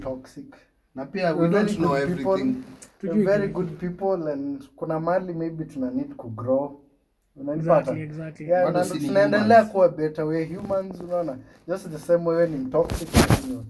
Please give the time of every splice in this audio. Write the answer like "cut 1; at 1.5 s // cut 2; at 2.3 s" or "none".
none